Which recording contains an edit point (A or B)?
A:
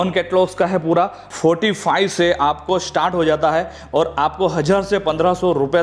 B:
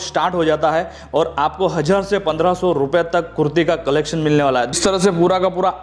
B